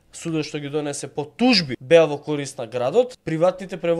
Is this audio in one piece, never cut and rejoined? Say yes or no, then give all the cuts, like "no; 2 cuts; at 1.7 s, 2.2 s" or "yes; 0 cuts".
no; 2 cuts; at 1.7 s, 3.2 s